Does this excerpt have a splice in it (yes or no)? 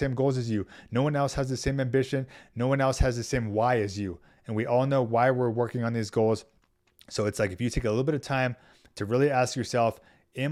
no